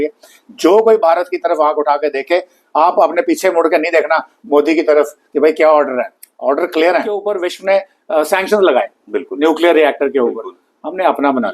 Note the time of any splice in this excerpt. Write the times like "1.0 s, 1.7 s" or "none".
7.3 s